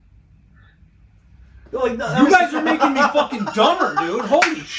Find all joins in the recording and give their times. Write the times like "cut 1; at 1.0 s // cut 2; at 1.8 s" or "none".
none

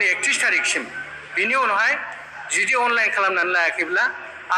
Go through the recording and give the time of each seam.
none

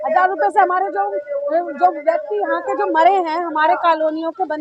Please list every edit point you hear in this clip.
none

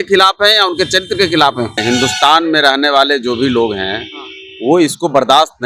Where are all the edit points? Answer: cut 1; at 1.8 s

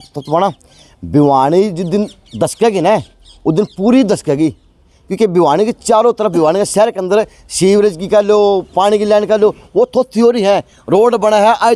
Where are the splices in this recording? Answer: none

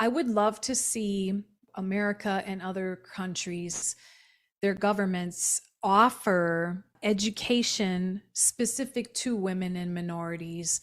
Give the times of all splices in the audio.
cut 1; at 1.6 s // cut 2; at 6.9 s

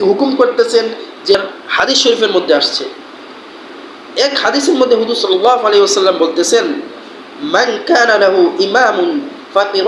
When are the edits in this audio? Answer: cut 1; at 1.4 s

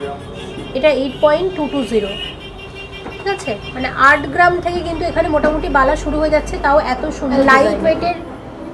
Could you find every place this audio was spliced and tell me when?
cut 1; at 7.4 s

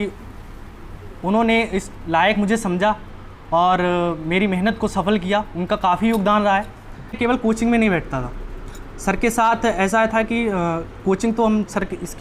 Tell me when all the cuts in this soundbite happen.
cut 1; at 7.2 s

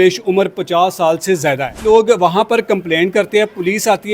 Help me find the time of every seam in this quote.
cut 1; at 1.8 s

